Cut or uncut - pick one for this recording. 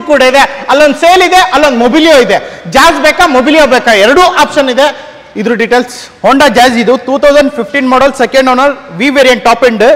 uncut